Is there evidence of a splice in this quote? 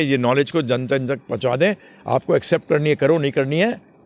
no; 0 cuts

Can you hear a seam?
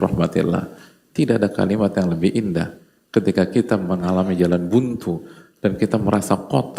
no; 0 cuts

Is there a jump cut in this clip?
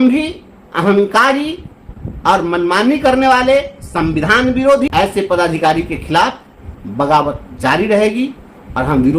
yes; 1 cut; at 4.9 s

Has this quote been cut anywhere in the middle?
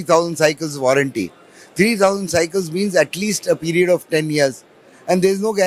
no; 0 cuts

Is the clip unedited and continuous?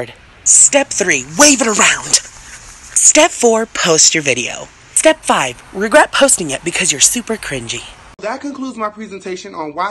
no; 1 cut; at 8.1 s

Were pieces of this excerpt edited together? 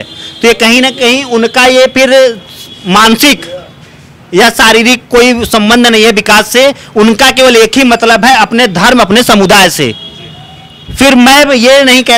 no; 0 cuts

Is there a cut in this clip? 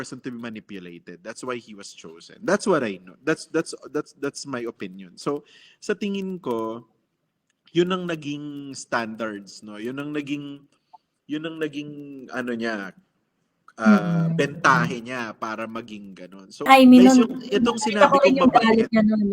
yes; 1 cut; at 16.7 s

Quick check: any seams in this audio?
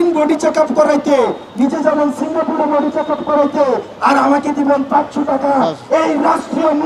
no; 0 cuts

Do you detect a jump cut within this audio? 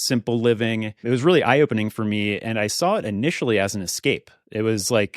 yes; 1 cut; at 0.9 s

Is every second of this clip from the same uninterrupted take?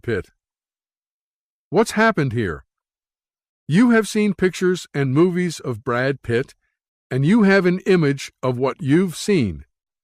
no; 1 cut; at 7.3 s

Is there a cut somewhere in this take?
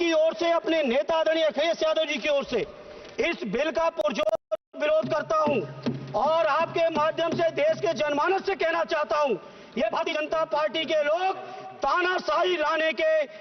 no; 0 cuts

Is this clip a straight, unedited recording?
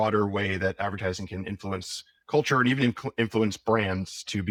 yes; 0 cuts

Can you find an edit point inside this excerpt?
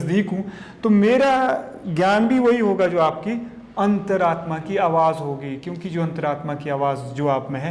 no; 0 cuts

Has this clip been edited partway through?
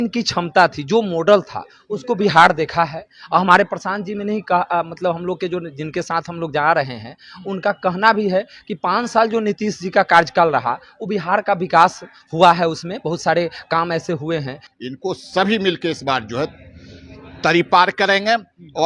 yes; 1 cut; at 14.6 s

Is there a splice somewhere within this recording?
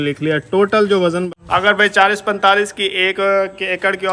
yes; 1 cut; at 1.3 s

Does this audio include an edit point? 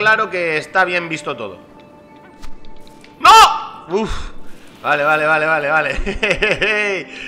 no; 0 cuts

